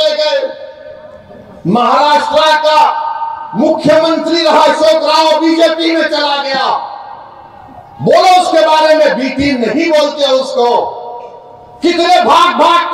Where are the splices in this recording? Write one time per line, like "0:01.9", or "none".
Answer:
none